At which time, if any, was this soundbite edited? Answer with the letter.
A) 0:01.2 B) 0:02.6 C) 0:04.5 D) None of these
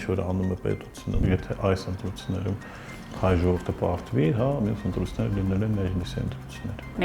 A